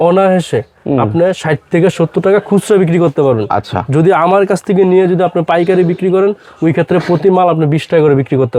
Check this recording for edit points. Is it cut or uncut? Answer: uncut